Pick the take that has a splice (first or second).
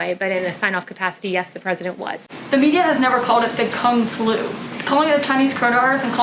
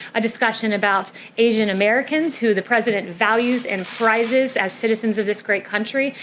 first